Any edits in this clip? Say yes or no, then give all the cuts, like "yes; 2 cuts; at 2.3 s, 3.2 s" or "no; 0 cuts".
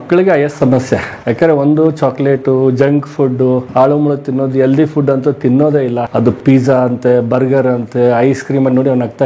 yes; 2 cuts; at 3.7 s, 6.4 s